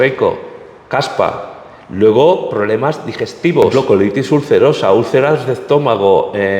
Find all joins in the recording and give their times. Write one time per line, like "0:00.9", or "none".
0:03.7